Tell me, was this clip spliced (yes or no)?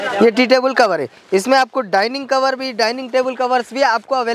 no